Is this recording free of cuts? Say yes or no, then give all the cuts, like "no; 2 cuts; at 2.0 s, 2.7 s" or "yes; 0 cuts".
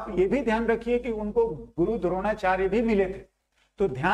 yes; 0 cuts